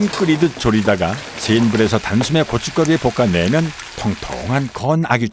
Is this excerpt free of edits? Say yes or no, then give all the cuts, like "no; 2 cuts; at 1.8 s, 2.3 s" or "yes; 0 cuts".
yes; 0 cuts